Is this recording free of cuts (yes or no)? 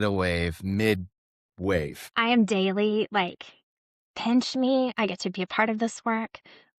no